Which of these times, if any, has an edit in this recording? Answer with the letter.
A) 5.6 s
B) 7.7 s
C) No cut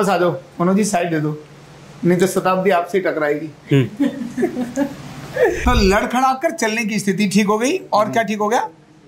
A